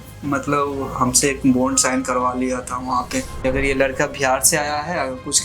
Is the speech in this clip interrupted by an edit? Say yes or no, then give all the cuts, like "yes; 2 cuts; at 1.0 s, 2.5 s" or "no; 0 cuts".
yes; 1 cut; at 3.4 s